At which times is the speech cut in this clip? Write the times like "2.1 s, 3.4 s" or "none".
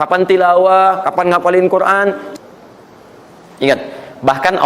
2.2 s